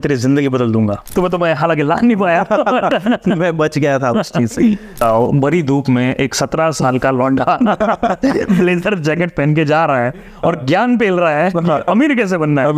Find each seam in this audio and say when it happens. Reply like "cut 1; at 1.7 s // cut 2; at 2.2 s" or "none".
cut 1; at 1.0 s // cut 2; at 5.0 s